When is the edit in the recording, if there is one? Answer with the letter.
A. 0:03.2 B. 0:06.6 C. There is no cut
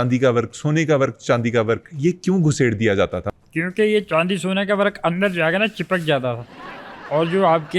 A